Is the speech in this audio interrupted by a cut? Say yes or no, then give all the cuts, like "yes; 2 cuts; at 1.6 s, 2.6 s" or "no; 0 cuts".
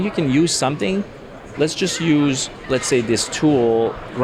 yes; 1 cut; at 2.5 s